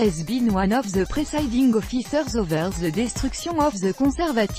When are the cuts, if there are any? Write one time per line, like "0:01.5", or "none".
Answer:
none